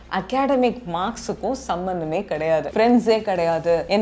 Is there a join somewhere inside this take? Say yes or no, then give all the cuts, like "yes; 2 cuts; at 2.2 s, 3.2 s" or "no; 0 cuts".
yes; 1 cut; at 2.7 s